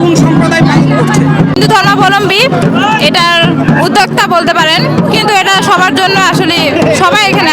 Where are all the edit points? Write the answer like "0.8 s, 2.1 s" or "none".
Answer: 1.5 s